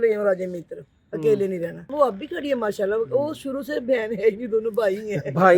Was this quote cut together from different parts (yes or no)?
yes